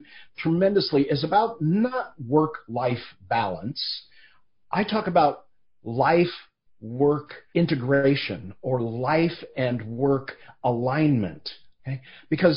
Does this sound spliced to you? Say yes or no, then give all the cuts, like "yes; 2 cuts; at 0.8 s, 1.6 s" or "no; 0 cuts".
yes; 1 cut; at 7.3 s